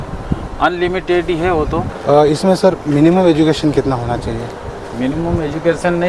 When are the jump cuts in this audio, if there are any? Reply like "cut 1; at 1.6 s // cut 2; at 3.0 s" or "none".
cut 1; at 1.9 s